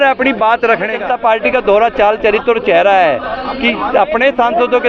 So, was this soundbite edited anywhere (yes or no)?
yes